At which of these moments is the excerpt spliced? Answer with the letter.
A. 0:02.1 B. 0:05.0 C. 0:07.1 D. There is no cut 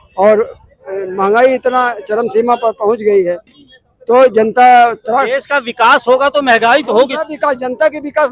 D